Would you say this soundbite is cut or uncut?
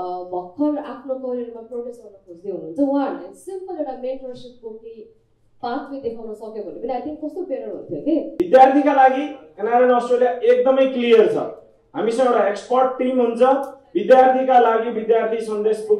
cut